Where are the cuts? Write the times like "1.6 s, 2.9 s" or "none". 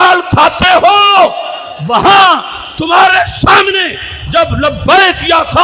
none